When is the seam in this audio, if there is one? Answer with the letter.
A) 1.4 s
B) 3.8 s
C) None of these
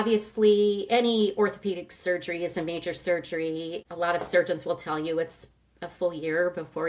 B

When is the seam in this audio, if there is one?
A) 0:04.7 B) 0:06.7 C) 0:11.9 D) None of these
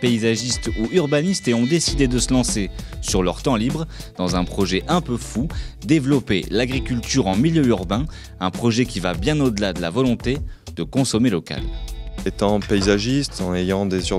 C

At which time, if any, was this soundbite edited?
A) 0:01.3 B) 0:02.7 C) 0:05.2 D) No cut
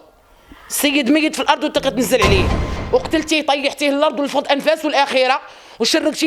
B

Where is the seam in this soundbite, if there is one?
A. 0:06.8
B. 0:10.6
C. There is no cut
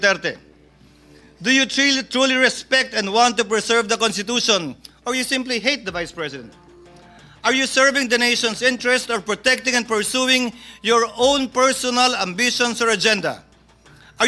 C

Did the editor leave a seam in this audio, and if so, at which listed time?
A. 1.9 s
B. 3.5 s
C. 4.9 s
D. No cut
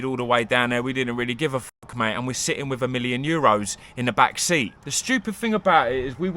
C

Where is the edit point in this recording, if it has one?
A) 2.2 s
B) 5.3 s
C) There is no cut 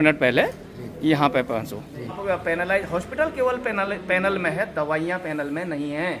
A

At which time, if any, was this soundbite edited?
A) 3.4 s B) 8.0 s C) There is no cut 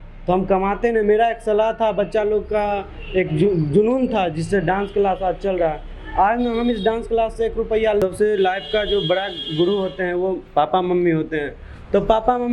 B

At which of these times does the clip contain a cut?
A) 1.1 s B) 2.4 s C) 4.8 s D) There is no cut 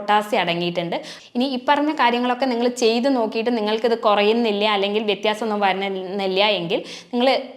A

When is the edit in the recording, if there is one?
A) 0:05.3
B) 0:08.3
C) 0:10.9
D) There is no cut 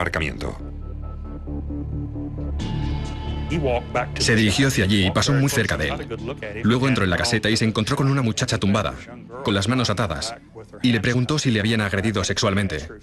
A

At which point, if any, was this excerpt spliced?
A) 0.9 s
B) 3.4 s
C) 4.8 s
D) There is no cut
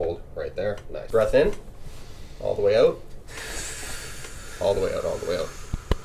A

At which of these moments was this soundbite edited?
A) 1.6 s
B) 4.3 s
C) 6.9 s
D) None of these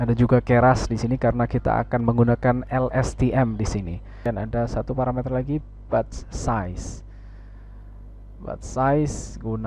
B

